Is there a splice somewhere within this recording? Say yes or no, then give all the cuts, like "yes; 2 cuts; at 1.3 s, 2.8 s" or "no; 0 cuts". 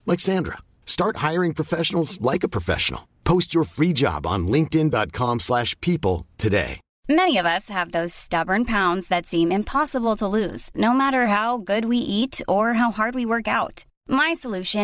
yes; 1 cut; at 6.9 s